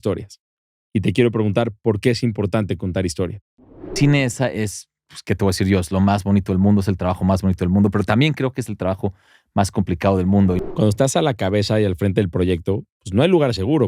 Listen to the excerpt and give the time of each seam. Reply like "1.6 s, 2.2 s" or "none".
3.9 s, 10.6 s